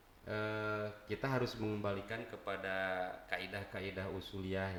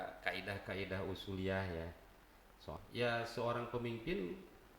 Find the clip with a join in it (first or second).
second